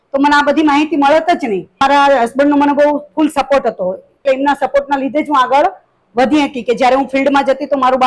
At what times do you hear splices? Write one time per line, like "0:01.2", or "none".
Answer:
0:01.8
0:04.2